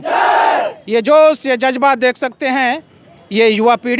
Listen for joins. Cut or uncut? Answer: uncut